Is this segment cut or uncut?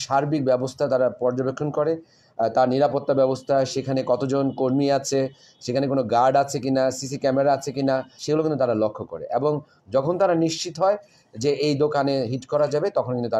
cut